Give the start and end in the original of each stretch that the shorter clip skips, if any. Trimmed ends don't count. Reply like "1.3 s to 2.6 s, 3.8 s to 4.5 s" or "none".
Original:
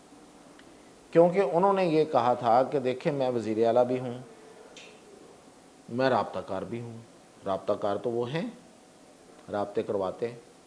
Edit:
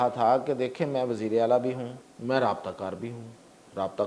4.3 s to 5.7 s